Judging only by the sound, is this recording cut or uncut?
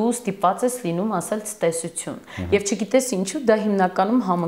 uncut